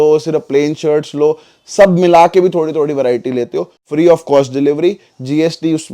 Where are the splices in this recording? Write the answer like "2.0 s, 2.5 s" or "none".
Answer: 3.8 s

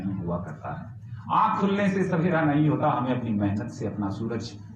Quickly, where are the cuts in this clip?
none

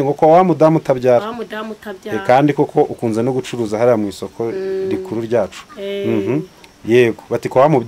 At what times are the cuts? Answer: none

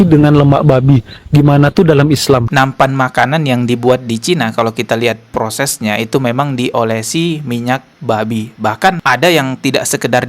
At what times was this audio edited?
2.5 s

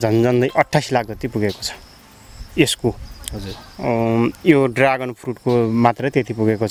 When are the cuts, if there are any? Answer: none

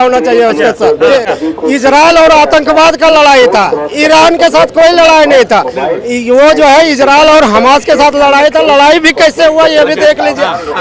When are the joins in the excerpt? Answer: 1.3 s

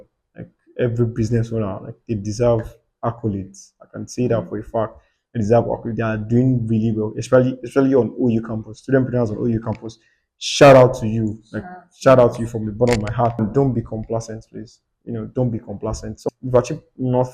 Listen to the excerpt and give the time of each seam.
13.4 s, 16.2 s

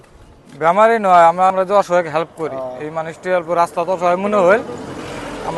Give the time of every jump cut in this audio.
none

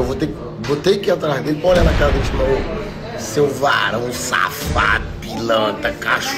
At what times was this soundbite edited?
none

